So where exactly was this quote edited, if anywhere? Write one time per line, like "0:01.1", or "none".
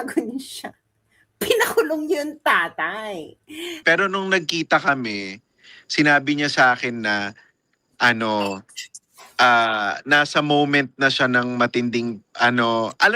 0:03.8